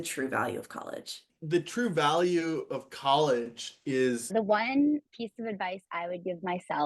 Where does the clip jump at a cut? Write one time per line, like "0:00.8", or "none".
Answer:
0:01.3
0:04.3